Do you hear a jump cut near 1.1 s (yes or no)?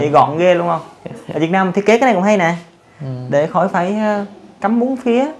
no